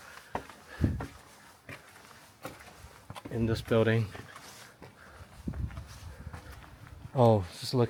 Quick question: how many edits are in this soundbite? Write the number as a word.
zero